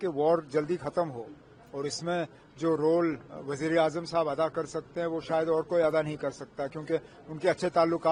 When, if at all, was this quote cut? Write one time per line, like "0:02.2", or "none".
none

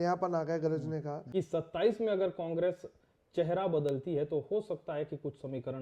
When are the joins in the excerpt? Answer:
0:01.2

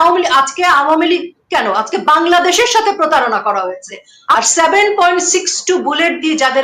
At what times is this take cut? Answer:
0:04.3

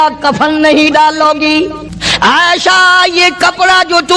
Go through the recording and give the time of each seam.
0:01.6

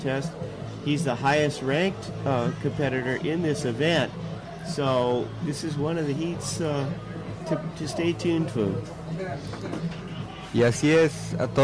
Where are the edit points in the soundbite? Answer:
0:04.0

